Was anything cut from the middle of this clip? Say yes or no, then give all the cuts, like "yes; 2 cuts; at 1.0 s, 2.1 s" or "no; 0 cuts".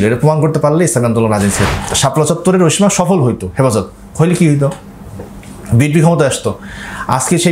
yes; 1 cut; at 1.6 s